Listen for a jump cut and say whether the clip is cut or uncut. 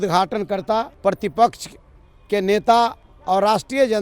cut